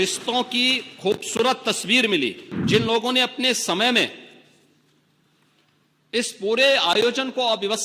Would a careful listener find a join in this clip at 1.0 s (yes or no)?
no